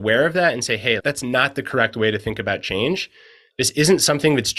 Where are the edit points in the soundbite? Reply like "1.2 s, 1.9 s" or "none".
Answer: 1.0 s